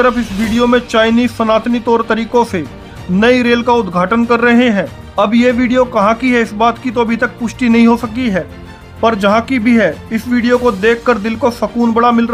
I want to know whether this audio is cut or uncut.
uncut